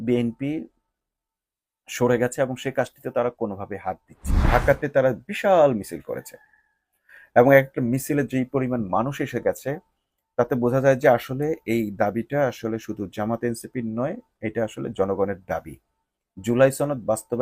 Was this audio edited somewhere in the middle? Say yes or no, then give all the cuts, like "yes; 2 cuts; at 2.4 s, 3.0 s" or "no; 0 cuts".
yes; 1 cut; at 4.4 s